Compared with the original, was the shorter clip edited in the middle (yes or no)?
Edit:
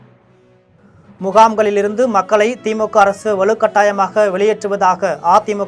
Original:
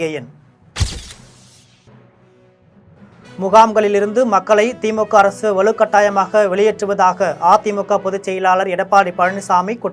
yes